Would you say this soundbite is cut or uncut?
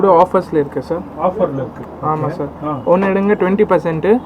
uncut